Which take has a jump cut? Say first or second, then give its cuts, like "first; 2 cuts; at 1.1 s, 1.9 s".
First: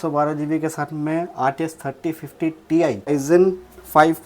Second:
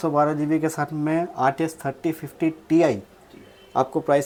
first; 1 cut; at 3.1 s